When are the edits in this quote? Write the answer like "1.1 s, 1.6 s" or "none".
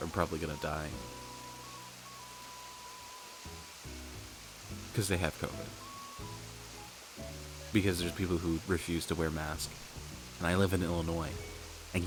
none